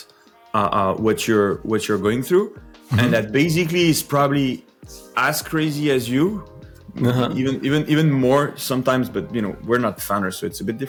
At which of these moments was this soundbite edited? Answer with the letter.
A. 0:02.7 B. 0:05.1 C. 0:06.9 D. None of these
D